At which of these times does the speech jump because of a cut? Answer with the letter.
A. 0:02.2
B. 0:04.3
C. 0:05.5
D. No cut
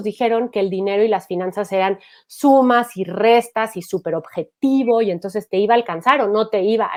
D